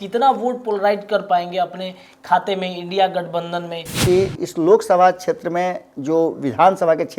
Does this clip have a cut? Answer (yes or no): yes